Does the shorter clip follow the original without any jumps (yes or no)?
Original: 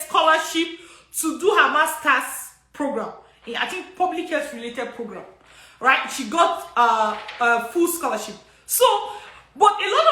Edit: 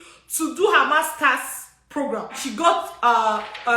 no